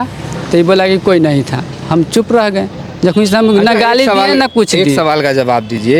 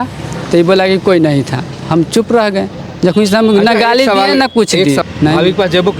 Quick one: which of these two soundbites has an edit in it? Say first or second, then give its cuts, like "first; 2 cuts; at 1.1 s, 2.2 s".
second; 1 cut; at 5.0 s